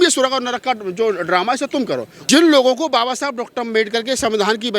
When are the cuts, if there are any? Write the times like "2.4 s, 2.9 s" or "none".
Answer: 2.1 s